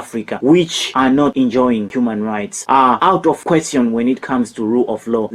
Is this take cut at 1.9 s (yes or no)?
yes